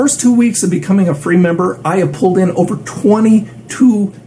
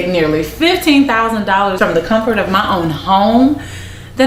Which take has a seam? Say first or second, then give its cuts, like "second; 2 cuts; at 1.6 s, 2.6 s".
second; 1 cut; at 1.8 s